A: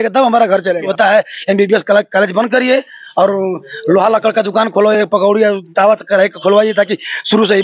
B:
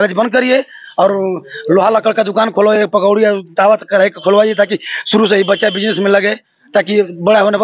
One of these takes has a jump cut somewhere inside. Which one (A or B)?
A